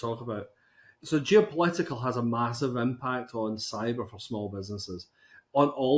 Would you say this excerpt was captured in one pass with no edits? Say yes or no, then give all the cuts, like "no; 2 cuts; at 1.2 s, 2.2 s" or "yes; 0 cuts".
no; 1 cut; at 0.9 s